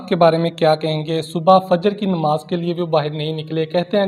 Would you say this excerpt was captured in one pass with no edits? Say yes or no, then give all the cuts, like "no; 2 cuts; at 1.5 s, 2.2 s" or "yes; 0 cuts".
yes; 0 cuts